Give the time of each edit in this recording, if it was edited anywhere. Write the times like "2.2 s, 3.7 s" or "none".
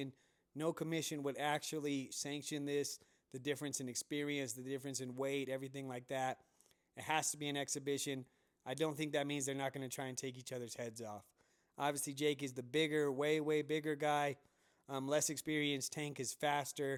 none